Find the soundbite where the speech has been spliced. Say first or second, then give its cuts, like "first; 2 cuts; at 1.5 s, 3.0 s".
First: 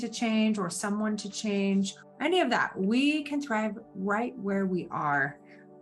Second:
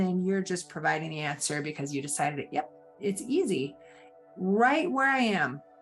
first; 1 cut; at 2.0 s